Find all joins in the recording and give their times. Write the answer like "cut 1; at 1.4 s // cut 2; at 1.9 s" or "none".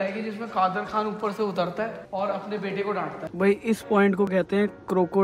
cut 1; at 2.0 s // cut 2; at 3.2 s